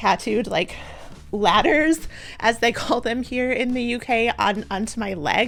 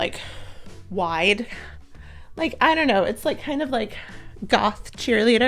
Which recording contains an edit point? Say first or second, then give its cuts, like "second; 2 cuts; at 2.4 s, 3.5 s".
second; 1 cut; at 1.6 s